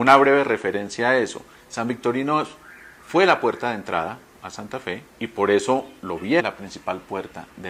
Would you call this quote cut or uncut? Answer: uncut